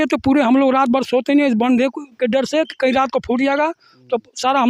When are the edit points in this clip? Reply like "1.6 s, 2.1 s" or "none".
none